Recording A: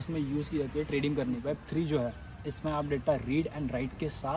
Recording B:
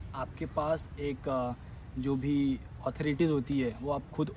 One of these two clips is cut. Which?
A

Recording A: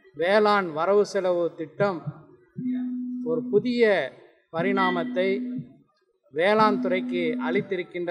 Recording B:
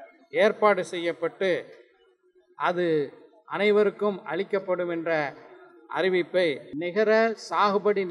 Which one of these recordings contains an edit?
B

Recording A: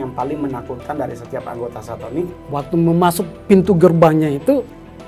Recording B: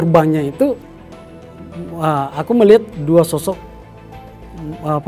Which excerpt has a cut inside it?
A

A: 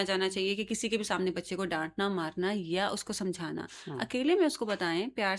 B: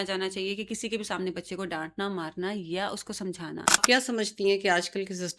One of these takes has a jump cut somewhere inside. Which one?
B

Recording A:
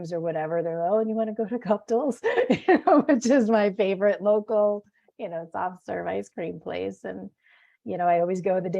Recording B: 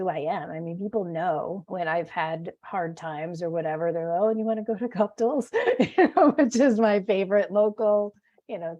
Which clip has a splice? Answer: B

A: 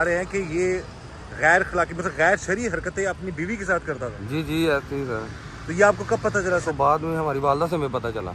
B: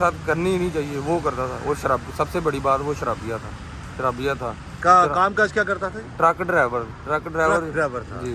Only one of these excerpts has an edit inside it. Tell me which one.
A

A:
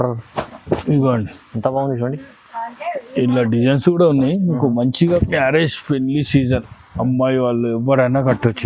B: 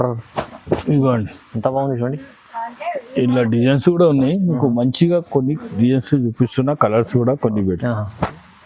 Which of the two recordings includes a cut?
A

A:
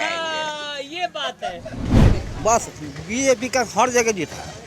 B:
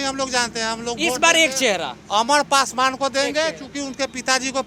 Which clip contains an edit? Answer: A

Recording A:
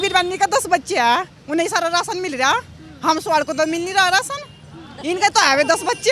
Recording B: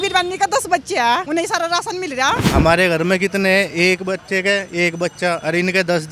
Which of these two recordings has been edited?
B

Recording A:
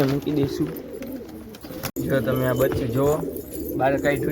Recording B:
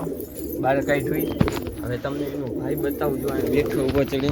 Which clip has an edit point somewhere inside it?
A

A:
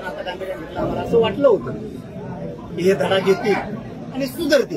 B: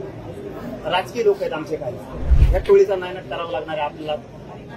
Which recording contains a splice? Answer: B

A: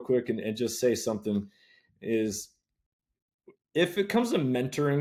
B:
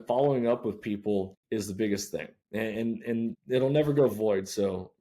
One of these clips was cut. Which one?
B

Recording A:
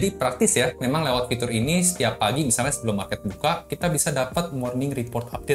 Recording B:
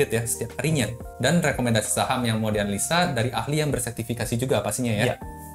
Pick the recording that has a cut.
B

